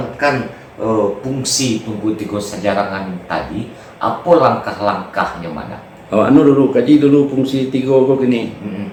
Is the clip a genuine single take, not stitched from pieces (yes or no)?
yes